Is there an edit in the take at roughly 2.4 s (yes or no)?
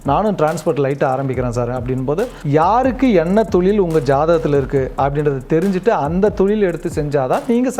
yes